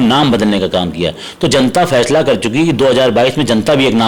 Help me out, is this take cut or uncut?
uncut